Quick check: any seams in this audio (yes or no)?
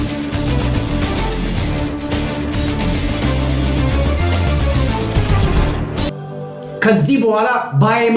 yes